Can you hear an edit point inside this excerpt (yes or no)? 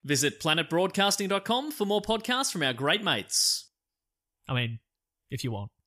no